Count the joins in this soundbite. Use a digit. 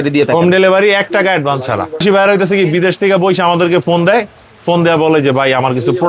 1